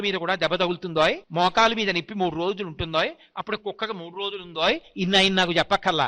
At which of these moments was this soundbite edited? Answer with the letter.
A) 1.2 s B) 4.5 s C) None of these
A